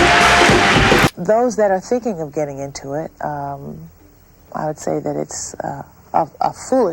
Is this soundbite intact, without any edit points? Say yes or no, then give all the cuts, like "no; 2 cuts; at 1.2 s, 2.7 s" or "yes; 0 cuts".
no; 1 cut; at 1.2 s